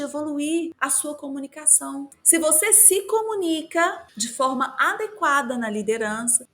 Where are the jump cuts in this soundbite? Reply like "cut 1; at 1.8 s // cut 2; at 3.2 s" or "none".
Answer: cut 1; at 4.1 s